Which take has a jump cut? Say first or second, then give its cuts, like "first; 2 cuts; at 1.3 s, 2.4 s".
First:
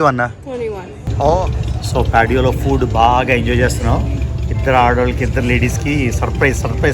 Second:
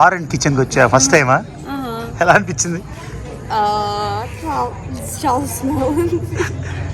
first; 1 cut; at 1.6 s